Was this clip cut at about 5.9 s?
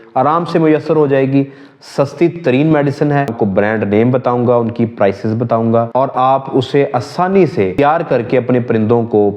yes; 3 cuts; at 3.3 s, 5.9 s, 7.7 s

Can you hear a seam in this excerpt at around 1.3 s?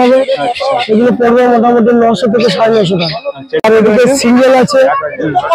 no; 1 cut; at 3.6 s

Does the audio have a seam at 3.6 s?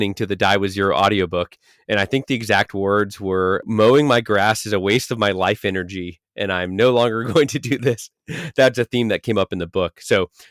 yes; 1 cut; at 3.6 s

